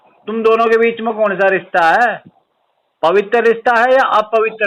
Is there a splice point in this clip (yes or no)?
no